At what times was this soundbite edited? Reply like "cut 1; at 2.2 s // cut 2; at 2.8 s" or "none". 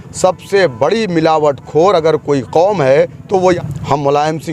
cut 1; at 3.5 s